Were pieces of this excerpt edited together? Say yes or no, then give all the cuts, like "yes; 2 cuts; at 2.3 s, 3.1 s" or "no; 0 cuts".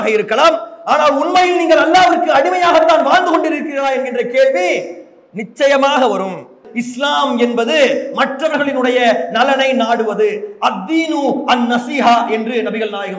yes; 1 cut; at 6.6 s